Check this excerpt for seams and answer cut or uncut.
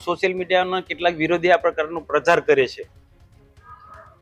uncut